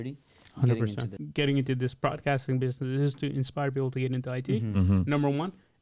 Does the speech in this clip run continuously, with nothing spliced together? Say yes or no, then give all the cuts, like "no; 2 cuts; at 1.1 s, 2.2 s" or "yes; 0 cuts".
no; 1 cut; at 1.1 s